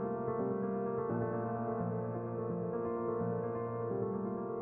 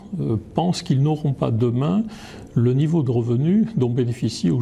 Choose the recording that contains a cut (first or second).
first